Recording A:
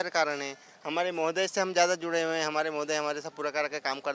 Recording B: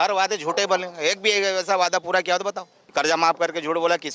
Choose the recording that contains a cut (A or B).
B